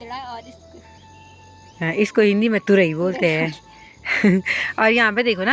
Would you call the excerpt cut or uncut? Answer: uncut